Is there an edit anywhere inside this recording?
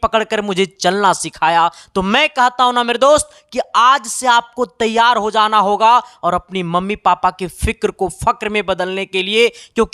no; 0 cuts

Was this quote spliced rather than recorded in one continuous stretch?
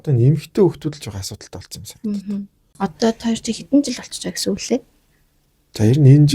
yes; 1 cut; at 2.6 s

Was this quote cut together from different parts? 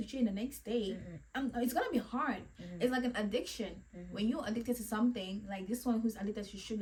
no; 0 cuts

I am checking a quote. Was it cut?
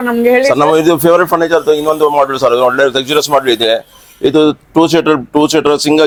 no; 0 cuts

